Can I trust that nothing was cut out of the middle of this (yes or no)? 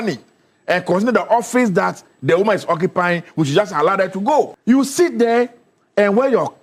yes